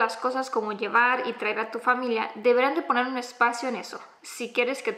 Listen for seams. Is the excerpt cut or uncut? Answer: uncut